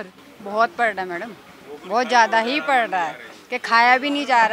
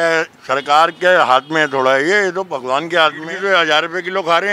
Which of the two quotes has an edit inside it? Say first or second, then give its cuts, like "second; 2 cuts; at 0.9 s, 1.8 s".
second; 1 cut; at 3.3 s